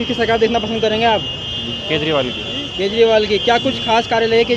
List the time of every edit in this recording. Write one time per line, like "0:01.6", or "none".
none